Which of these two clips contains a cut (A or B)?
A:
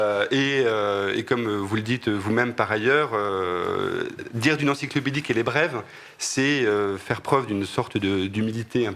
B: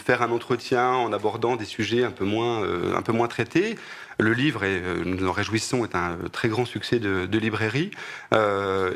B